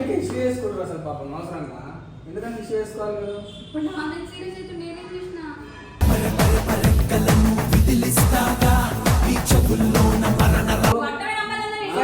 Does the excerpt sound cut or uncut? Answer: cut